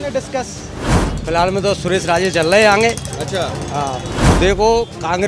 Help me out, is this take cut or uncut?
cut